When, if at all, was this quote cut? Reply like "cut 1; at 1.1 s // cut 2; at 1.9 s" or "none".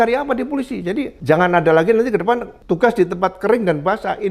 cut 1; at 1.1 s // cut 2; at 2.5 s

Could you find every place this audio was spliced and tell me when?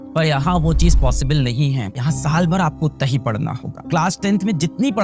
cut 1; at 1.9 s // cut 2; at 3.9 s

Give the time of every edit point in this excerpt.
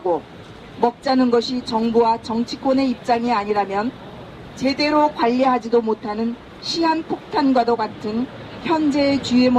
cut 1; at 3.0 s

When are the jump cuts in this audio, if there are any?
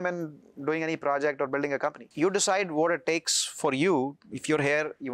cut 1; at 2.0 s

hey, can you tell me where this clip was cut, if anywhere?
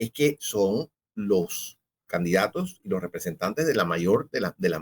cut 1; at 1.0 s

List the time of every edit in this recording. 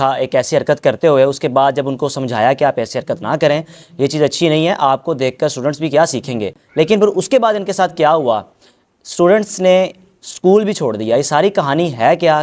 none

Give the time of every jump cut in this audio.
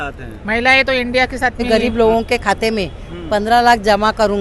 cut 1; at 1.6 s

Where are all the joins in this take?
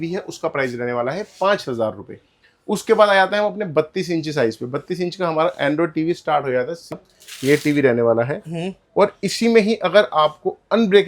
cut 1; at 6.9 s

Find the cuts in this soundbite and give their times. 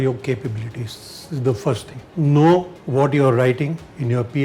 cut 1; at 2.0 s // cut 2; at 2.8 s

